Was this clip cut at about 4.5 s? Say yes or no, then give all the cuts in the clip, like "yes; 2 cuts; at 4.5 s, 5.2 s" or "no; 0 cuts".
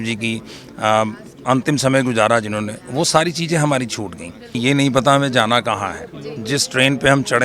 yes; 1 cut; at 4.5 s